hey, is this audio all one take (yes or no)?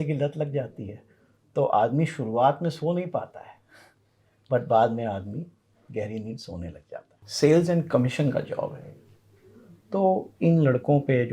no